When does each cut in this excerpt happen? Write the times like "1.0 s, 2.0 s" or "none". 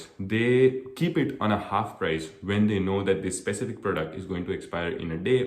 none